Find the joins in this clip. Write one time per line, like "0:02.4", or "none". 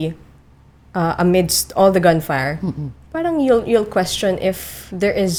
none